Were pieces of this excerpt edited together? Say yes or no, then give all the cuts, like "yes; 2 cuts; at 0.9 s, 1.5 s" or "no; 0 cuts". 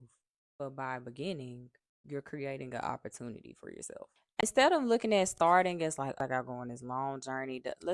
yes; 1 cut; at 4.4 s